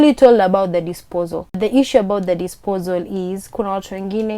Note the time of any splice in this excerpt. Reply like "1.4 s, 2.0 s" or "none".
1.6 s